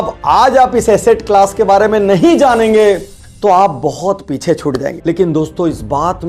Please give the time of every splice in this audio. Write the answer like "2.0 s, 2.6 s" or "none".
5.0 s